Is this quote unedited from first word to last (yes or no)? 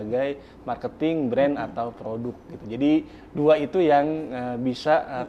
yes